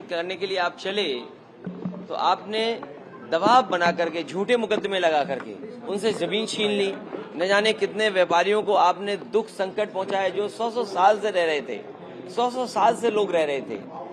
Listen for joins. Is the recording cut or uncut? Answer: uncut